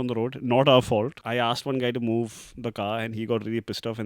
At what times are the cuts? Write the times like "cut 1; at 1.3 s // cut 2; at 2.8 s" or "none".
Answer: cut 1; at 1.2 s